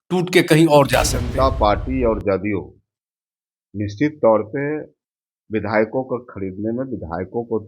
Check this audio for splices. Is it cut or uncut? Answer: cut